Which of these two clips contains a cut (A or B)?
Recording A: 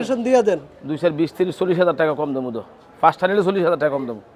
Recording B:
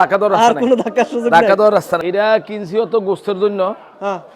B